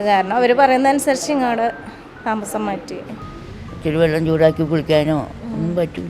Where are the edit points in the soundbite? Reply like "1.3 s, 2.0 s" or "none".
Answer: 3.3 s